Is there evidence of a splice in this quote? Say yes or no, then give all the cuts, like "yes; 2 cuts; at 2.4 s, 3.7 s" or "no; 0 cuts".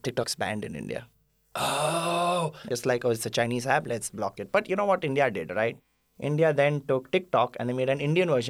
yes; 1 cut; at 2.6 s